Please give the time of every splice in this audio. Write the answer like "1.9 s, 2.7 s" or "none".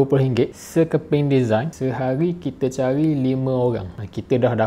none